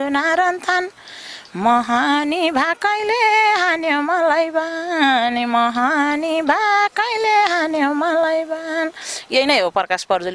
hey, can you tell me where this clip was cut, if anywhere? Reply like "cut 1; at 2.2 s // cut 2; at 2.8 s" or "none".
none

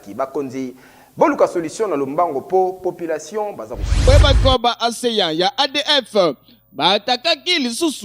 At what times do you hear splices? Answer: cut 1; at 4.1 s

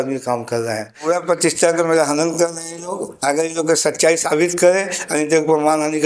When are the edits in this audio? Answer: cut 1; at 0.9 s

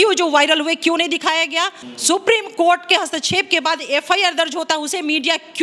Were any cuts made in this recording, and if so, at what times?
cut 1; at 1.9 s

